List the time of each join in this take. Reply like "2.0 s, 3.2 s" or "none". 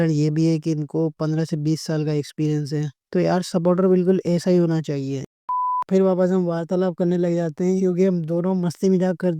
5.5 s